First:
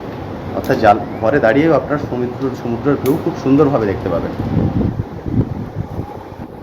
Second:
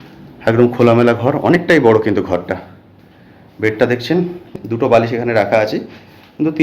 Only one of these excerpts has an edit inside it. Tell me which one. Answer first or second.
second